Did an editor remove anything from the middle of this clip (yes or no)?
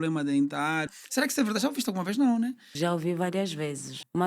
yes